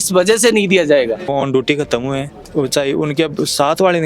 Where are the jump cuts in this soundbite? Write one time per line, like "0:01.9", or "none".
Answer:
0:01.3